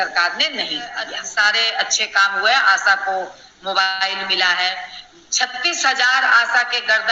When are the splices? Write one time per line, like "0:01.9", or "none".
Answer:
0:01.2

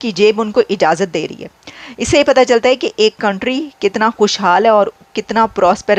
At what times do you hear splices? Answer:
none

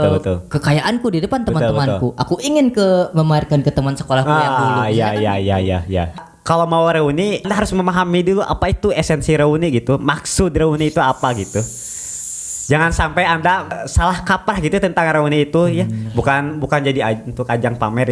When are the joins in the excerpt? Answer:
0:06.2
0:07.5
0:13.8

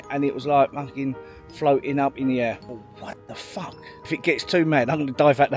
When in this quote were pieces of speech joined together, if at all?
0:02.6
0:04.1

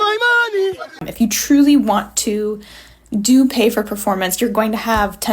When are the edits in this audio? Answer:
0:00.9

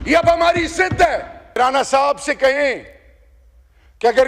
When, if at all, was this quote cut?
0:01.6

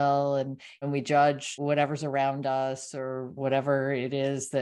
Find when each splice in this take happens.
0:00.8
0:01.6
0:03.3

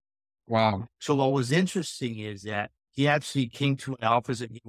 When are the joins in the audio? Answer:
0:00.9
0:02.8

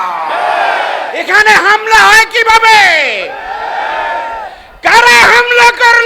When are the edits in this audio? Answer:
0:01.1

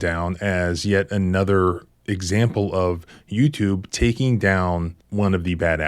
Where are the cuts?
0:05.0

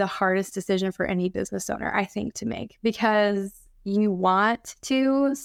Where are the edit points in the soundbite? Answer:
none

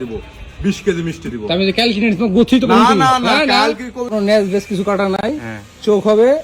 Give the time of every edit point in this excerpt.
0:04.1

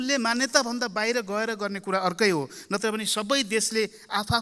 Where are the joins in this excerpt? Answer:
none

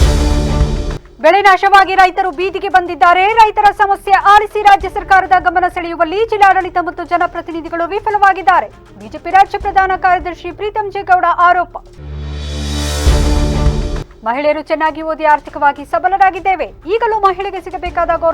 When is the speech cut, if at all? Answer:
0:01.0

